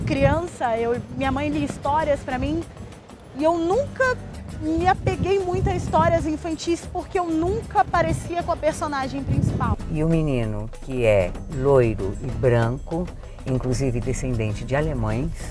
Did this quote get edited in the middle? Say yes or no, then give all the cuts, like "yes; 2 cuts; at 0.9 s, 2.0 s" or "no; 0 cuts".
yes; 1 cut; at 9.7 s